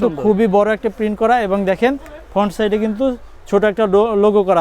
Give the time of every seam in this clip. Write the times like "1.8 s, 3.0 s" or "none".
none